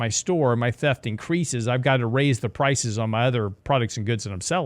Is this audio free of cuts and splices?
no; 1 cut; at 3.6 s

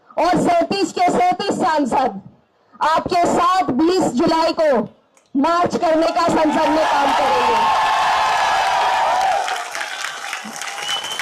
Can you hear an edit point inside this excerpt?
no; 0 cuts

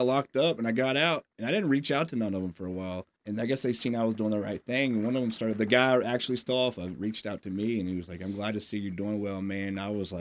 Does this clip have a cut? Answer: yes; 2 cuts; at 1.3 s, 3.1 s

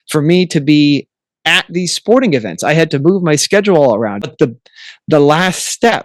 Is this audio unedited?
no; 1 cut; at 4.3 s

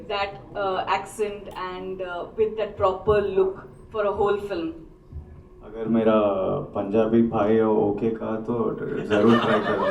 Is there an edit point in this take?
no; 0 cuts

